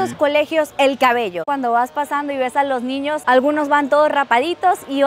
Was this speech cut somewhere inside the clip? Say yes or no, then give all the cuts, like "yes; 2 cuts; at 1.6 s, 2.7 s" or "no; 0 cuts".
yes; 1 cut; at 1.4 s